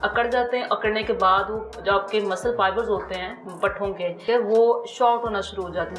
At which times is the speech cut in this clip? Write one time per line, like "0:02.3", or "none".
0:04.2